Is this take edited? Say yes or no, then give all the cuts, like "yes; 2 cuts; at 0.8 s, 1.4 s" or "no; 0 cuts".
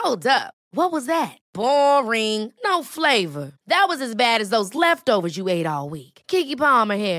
no; 0 cuts